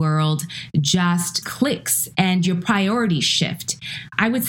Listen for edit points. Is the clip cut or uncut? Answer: cut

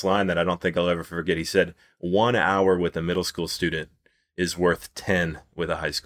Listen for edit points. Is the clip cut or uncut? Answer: uncut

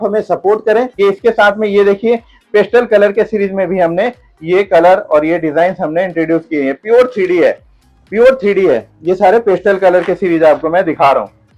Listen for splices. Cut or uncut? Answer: uncut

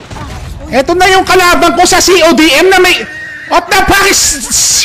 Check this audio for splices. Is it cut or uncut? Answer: uncut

